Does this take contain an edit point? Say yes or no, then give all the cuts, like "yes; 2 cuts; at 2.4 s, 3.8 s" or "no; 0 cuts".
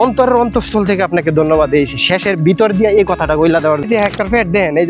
yes; 1 cut; at 3.9 s